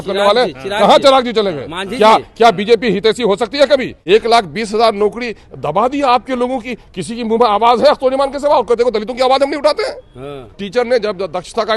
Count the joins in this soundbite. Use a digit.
2